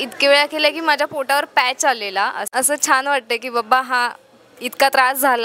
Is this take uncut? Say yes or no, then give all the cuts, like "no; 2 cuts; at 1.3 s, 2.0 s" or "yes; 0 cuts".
no; 1 cut; at 2.5 s